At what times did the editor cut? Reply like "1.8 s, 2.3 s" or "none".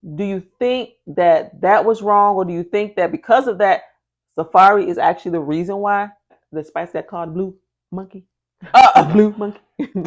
6.4 s